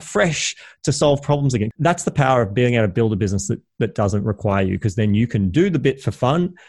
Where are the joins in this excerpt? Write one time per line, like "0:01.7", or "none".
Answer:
0:01.7